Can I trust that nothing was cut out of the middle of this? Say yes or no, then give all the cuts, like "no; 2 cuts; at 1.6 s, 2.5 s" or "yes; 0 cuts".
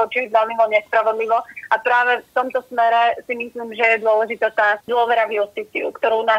no; 1 cut; at 4.8 s